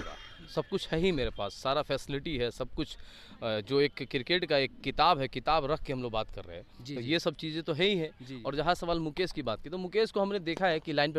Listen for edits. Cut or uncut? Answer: uncut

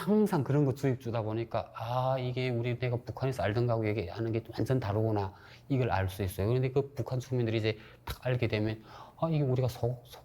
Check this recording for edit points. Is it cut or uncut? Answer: uncut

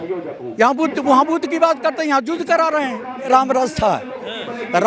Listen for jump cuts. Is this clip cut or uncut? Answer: cut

